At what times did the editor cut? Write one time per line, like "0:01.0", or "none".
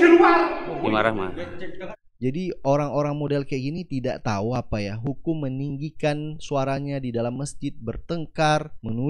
0:01.9